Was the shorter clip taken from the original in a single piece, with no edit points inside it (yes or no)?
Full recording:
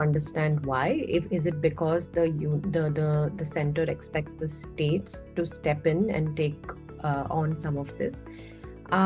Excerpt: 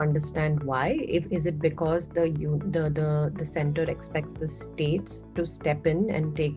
yes